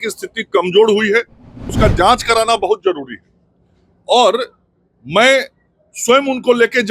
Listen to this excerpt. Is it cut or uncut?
cut